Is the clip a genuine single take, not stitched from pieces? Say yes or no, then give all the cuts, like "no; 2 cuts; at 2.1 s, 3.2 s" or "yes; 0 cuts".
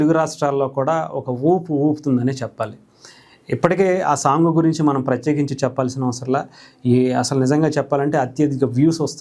yes; 0 cuts